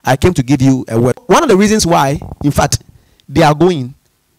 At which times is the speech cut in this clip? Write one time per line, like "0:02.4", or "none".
0:01.2

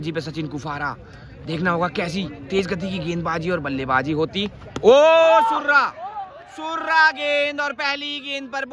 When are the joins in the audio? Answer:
none

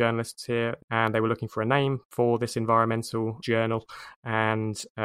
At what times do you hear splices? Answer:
0:00.8
0:02.0
0:03.4

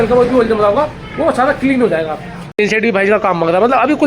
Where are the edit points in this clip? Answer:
0:02.4

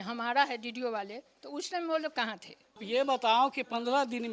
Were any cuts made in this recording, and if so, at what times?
0:02.8

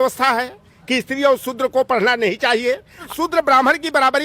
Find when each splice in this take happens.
0:03.0

